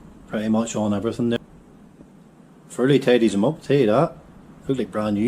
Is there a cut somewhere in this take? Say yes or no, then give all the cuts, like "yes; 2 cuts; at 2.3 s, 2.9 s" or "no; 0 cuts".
yes; 1 cut; at 1.4 s